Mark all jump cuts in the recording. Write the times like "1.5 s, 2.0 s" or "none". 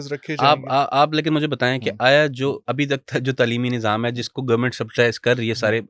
none